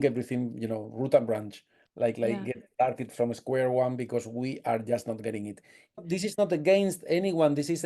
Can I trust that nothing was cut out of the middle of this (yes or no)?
no